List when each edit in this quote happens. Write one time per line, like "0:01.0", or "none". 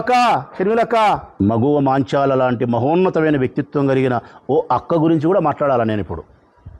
0:01.3